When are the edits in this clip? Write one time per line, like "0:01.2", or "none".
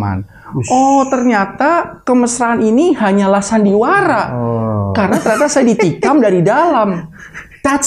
none